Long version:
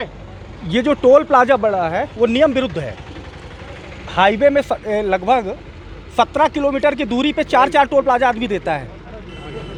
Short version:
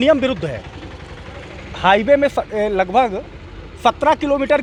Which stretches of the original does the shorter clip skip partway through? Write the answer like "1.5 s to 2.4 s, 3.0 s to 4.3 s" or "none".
none